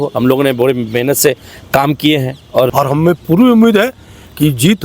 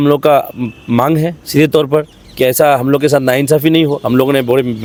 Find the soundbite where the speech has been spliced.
first; 1 cut; at 2.7 s

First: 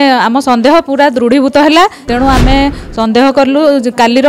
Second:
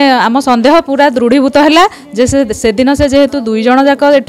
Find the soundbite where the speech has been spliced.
first; 1 cut; at 2.0 s

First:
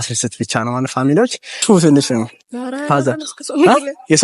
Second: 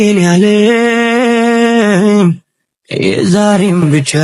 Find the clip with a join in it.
first; 1 cut; at 1.6 s

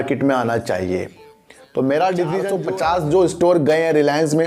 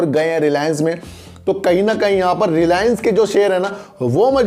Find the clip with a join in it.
first; 1 cut; at 2.5 s

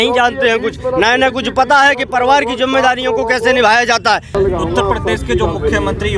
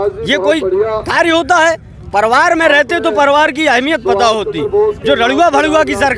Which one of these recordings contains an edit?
first; 1 cut; at 4.3 s

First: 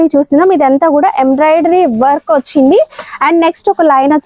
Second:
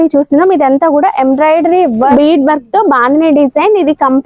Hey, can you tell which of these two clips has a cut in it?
second; 1 cut; at 2.1 s

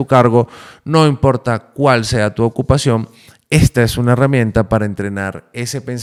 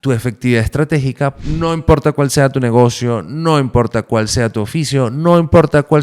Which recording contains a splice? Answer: second; 1 cut; at 1.4 s

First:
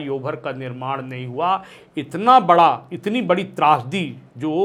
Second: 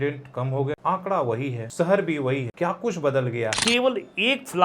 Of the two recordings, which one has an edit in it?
second; 4 cuts; at 0.8 s, 1.6 s, 2.5 s, 3.6 s

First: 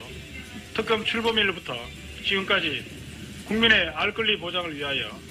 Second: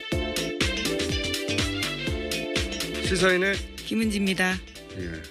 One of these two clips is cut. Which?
second; 1 cut; at 2.0 s

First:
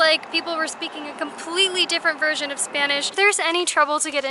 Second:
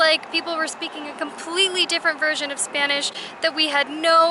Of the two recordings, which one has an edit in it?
first; 1 cut; at 3.1 s

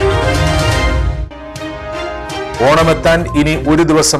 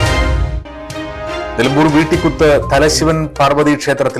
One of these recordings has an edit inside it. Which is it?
second; 1 cut; at 1.4 s

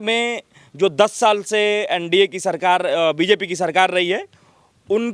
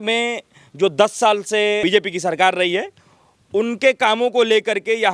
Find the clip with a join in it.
second; 1 cut; at 1.8 s

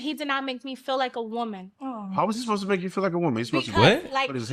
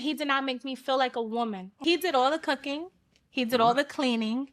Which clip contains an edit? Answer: second; 1 cut; at 1.8 s

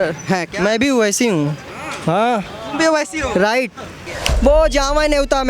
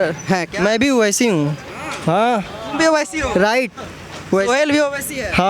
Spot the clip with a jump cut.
first; 1 cut; at 4.1 s

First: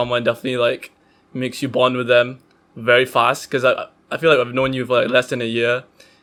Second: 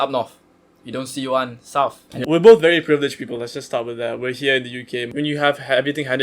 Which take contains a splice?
second; 2 cuts; at 2.1 s, 5.1 s

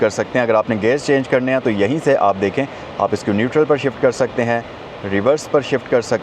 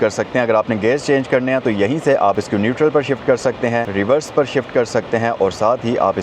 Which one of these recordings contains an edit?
second; 2 cuts; at 2.4 s, 3.9 s

